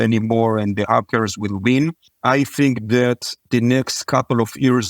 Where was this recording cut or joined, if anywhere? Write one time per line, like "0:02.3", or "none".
0:02.1
0:03.3

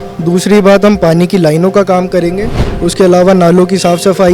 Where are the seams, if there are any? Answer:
0:02.6

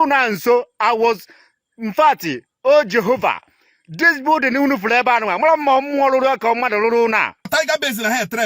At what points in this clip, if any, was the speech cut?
0:07.5

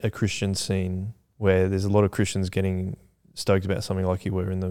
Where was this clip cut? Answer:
0:01.2

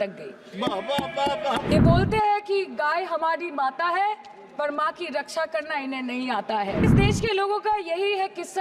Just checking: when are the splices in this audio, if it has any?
0:01.7
0:06.9

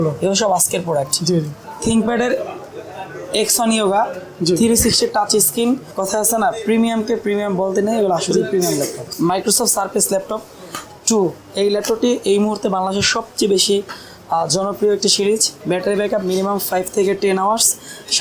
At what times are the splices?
0:01.6
0:05.9
0:09.0
0:15.5

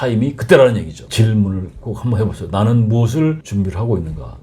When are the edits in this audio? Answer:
0:01.0
0:03.4

